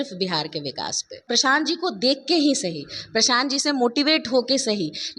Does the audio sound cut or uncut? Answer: cut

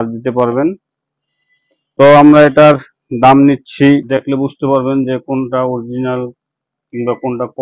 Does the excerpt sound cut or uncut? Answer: cut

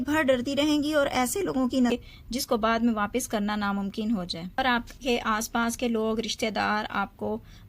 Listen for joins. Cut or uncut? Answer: cut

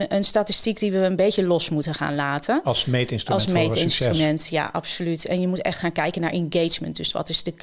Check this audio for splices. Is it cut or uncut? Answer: uncut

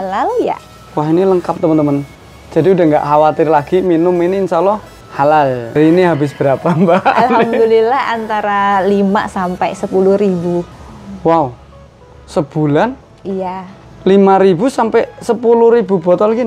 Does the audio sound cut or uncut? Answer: cut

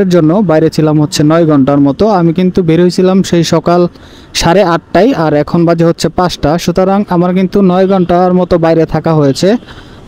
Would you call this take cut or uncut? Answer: uncut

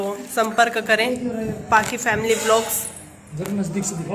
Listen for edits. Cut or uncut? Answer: uncut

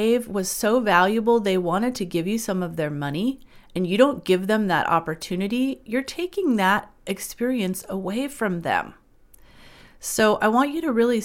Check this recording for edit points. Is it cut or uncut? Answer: uncut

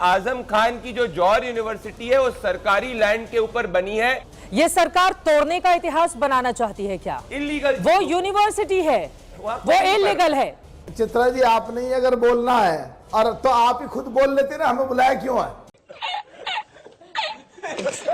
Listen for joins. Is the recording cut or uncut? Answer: cut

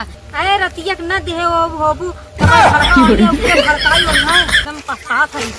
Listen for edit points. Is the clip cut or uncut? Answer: cut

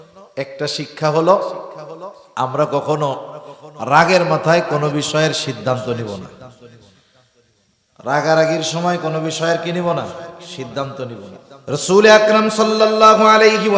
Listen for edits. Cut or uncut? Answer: cut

